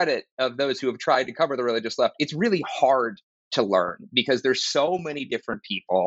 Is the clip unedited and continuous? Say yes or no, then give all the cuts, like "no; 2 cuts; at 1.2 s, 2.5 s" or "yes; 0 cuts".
yes; 0 cuts